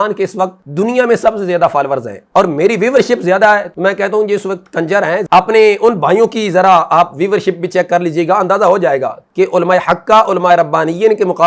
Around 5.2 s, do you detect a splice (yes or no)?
yes